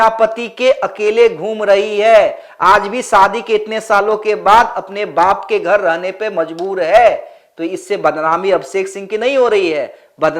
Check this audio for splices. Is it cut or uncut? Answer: uncut